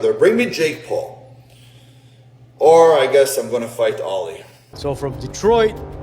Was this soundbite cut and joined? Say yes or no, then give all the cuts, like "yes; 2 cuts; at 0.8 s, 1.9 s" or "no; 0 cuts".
yes; 1 cut; at 4.7 s